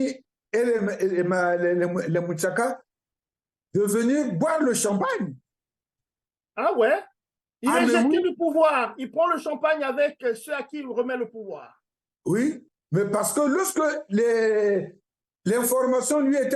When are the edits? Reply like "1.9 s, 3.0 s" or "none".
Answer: none